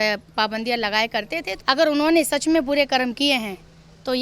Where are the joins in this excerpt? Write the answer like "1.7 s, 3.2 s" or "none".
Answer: 1.4 s